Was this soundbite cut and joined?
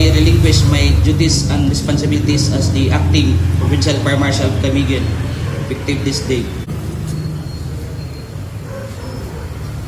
yes; 1 cut; at 6.7 s

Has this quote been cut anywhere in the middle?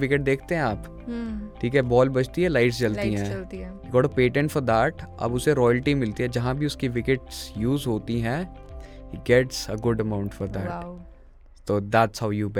no; 0 cuts

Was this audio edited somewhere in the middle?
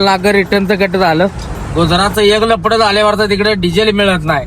yes; 1 cut; at 2.0 s

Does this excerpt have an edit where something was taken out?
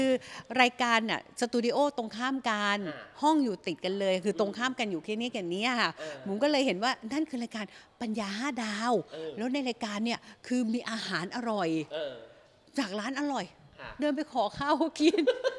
no; 0 cuts

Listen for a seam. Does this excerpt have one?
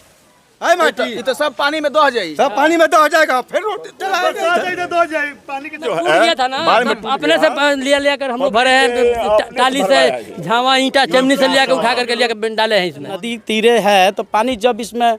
yes; 2 cuts; at 5.8 s, 13.3 s

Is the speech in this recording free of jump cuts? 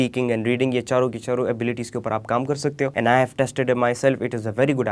no; 1 cut; at 2.9 s

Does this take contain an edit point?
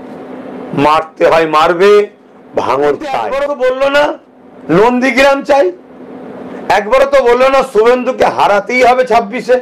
yes; 1 cut; at 3.3 s

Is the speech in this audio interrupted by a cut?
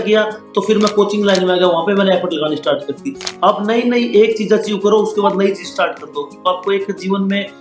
no; 0 cuts

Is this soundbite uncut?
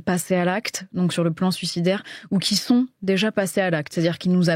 yes; 0 cuts

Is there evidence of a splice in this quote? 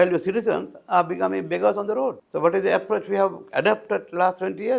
yes; 1 cut; at 2.2 s

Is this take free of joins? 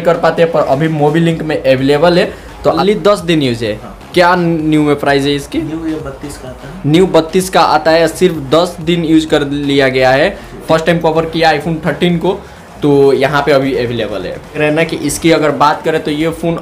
no; 3 cuts; at 2.8 s, 10.6 s, 14.6 s

